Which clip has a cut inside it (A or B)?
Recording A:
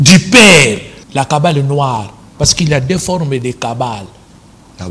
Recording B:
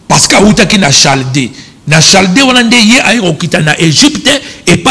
A